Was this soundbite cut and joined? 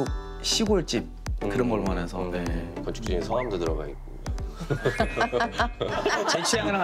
yes; 3 cuts; at 2.7 s, 4.5 s, 6.0 s

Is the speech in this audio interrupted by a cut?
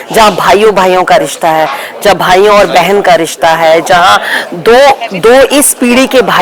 no; 0 cuts

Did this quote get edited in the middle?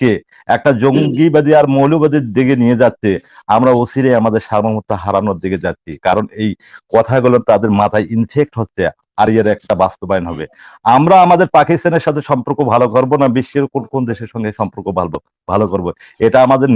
no; 0 cuts

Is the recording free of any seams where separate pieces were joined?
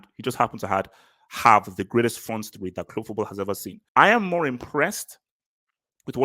no; 1 cut; at 3.7 s

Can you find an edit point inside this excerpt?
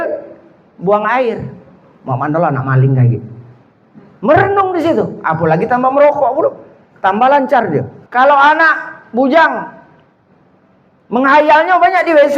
yes; 1 cut; at 8.0 s

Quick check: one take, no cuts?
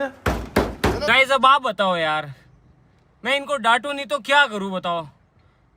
no; 1 cut; at 1.0 s

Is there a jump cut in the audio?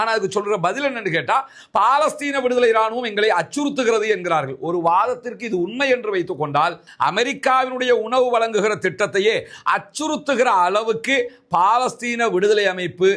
no; 0 cuts

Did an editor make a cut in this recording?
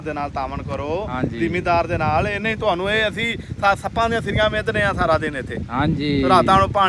no; 0 cuts

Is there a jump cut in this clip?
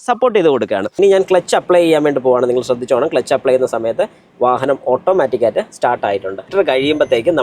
yes; 2 cuts; at 1.0 s, 6.5 s

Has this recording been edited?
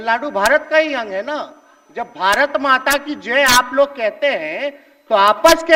no; 0 cuts

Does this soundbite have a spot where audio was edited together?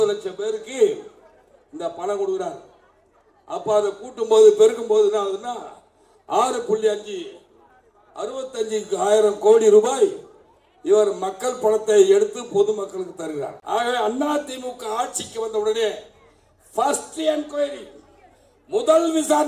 yes; 1 cut; at 13.6 s

